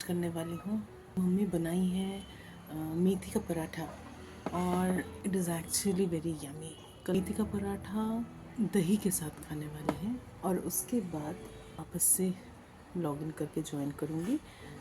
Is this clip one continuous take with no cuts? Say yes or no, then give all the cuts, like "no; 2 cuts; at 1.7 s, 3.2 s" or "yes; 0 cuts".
no; 6 cuts; at 1.2 s, 5.1 s, 7.1 s, 8.4 s, 10.3 s, 11.9 s